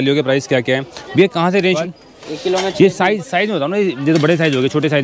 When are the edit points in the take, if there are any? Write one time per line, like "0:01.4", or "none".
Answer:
0:01.8